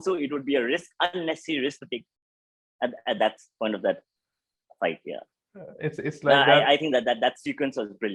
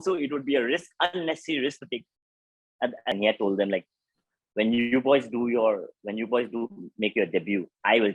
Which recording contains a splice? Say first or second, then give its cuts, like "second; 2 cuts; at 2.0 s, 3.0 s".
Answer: second; 1 cut; at 3.1 s